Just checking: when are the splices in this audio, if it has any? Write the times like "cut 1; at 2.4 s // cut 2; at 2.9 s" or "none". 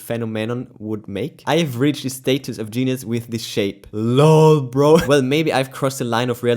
cut 1; at 5.0 s

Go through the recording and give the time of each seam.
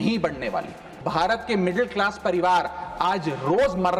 cut 1; at 1.0 s

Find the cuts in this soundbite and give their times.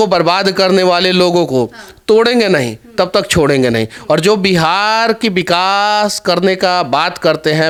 none

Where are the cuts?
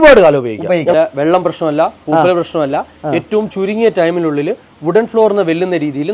cut 1; at 0.9 s

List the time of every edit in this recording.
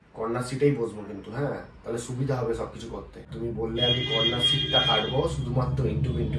cut 1; at 3.3 s

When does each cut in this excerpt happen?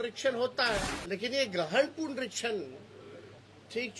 cut 1; at 0.9 s

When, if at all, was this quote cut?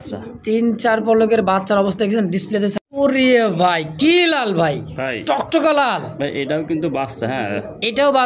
cut 1; at 2.8 s

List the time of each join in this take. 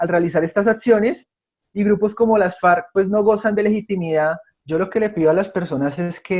cut 1; at 4.5 s

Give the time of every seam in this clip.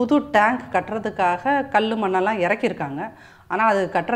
none

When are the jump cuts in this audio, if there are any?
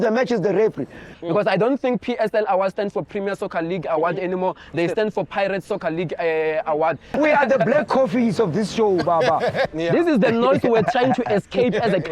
cut 1; at 1.1 s // cut 2; at 7.2 s // cut 3; at 9.7 s

